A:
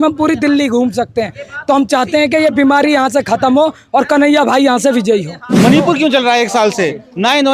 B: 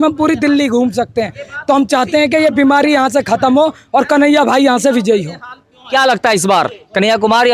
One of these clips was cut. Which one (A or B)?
A